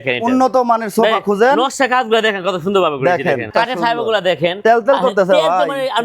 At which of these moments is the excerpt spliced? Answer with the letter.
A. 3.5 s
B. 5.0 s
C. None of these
A